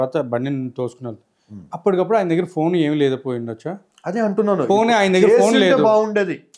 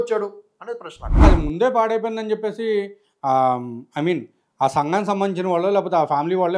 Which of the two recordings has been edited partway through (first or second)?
second